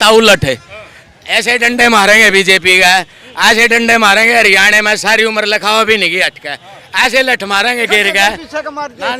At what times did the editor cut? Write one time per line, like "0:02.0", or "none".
none